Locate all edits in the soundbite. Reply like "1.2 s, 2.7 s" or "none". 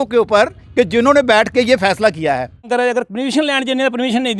2.7 s